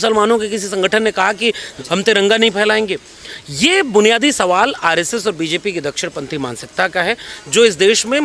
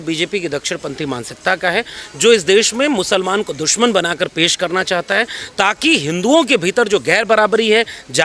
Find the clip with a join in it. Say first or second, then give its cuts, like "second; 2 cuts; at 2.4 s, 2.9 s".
first; 1 cut; at 1.7 s